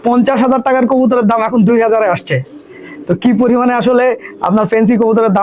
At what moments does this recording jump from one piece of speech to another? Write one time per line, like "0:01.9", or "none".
none